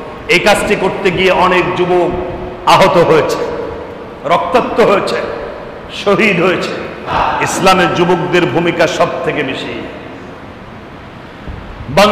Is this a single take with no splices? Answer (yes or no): no